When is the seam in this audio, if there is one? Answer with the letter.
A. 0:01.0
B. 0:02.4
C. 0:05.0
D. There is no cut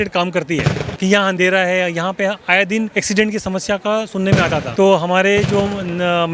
A